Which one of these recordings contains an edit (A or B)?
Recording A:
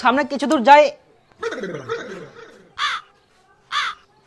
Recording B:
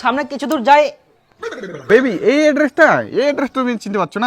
B